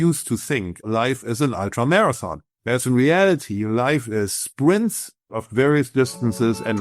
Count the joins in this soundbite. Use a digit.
2